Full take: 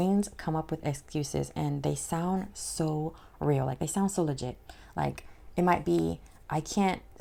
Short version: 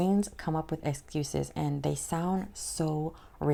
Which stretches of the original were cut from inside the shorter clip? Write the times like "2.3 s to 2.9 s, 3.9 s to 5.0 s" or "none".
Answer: none